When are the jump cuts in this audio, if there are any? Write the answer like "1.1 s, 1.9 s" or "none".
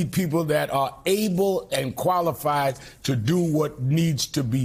none